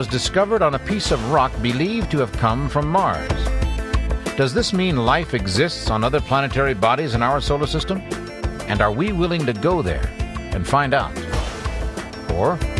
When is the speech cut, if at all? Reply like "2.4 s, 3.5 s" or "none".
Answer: 3.9 s